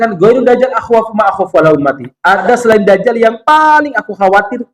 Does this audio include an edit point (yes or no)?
yes